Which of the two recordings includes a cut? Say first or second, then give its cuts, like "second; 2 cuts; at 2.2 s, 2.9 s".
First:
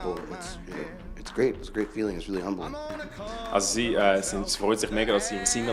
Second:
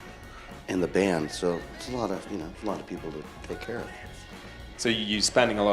second; 1 cut; at 2.6 s